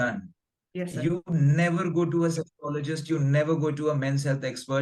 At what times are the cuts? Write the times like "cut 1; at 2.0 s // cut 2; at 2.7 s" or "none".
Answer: none